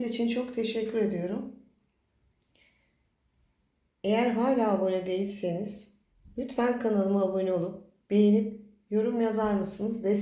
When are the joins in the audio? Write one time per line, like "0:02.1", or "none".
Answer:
none